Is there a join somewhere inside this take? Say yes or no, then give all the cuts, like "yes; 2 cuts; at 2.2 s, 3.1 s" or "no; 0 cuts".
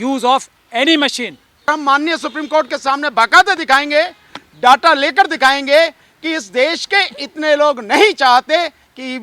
yes; 1 cut; at 1.7 s